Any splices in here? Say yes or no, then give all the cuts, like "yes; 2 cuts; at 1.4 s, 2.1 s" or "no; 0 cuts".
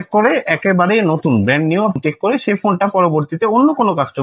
yes; 1 cut; at 2.0 s